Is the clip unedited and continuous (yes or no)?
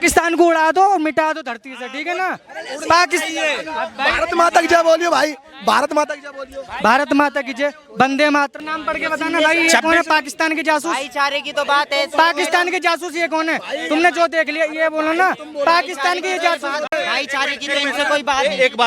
no